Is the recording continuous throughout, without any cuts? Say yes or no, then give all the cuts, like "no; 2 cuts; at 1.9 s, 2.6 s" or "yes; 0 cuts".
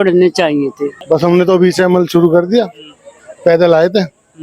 no; 1 cut; at 1.0 s